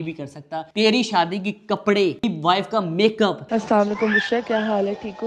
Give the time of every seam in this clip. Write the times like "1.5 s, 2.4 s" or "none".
3.4 s